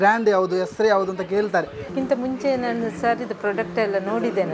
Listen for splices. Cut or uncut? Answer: cut